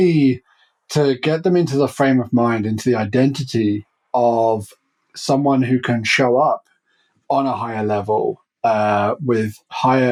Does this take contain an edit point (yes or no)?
no